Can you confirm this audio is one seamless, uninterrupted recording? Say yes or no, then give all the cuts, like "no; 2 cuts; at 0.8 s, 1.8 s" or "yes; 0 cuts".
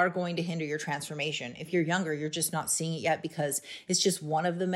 yes; 0 cuts